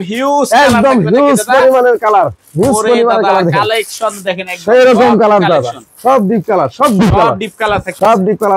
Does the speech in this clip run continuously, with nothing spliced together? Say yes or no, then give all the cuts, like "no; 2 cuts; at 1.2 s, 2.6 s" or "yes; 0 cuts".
yes; 0 cuts